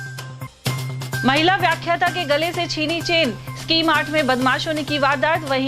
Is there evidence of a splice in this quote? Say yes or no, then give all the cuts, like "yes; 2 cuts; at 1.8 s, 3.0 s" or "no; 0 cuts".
yes; 1 cut; at 0.9 s